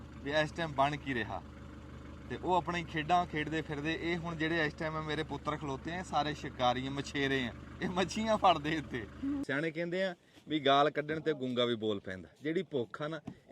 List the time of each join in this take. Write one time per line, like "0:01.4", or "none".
0:09.4